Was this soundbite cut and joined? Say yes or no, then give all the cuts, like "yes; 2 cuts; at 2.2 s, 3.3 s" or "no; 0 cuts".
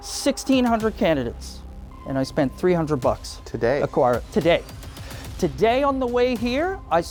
no; 0 cuts